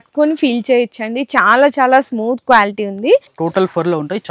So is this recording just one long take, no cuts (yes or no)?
no